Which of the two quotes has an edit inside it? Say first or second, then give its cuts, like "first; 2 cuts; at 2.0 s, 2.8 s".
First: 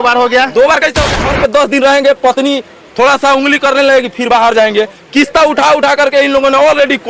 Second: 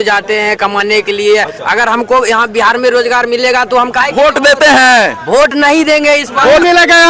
first; 1 cut; at 1.1 s